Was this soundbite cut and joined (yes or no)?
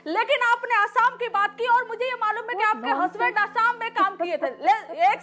no